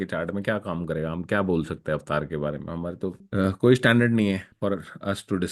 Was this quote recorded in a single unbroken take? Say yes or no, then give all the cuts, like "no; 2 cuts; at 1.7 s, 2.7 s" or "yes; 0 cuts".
no; 2 cuts; at 3.2 s, 4.5 s